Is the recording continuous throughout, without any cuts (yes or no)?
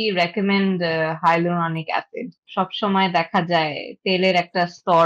no